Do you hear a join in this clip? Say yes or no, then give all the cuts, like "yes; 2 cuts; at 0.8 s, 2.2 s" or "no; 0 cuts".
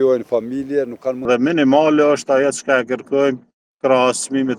yes; 1 cut; at 1.2 s